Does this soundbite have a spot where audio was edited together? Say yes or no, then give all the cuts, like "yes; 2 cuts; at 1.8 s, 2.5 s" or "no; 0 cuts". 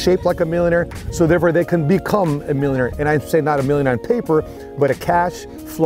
no; 0 cuts